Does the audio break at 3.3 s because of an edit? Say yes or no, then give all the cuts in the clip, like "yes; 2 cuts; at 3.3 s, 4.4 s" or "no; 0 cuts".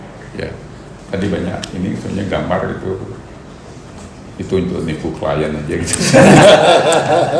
no; 1 cut; at 0.9 s